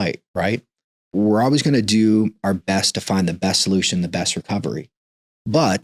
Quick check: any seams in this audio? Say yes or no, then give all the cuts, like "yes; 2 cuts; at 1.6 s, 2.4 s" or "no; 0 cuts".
yes; 1 cut; at 1.1 s